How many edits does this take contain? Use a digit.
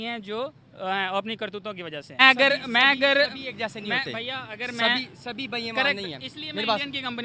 1